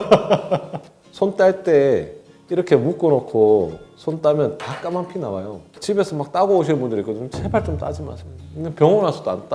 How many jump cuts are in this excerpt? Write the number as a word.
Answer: two